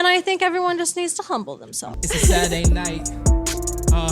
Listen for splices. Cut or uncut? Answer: cut